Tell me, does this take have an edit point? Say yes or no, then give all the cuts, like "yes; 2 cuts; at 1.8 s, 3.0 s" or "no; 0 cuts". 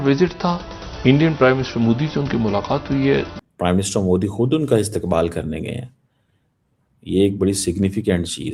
yes; 1 cut; at 3.4 s